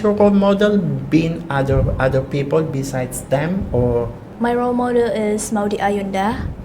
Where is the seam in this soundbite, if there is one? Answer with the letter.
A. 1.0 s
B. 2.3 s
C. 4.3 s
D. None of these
C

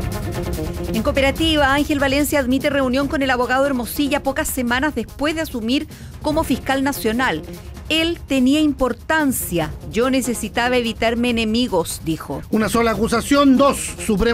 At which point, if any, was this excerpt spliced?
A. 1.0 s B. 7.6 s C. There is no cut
A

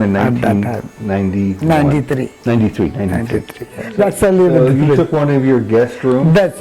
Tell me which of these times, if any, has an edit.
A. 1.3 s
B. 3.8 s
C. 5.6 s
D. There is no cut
B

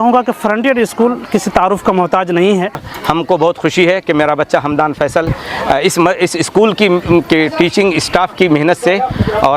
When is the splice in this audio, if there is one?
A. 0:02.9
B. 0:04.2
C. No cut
A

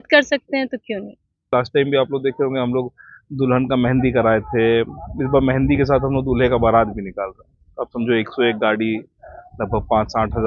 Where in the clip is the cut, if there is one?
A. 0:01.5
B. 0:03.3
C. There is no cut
A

